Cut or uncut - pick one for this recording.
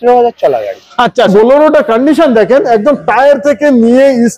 cut